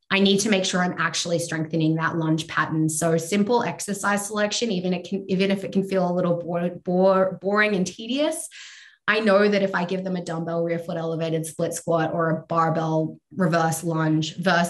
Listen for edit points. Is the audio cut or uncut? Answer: uncut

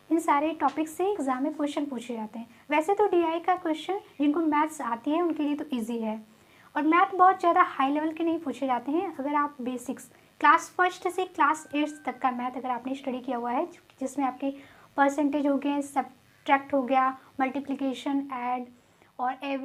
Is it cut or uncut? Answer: uncut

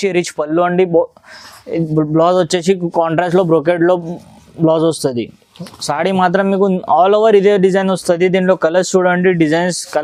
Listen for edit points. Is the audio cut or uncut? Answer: uncut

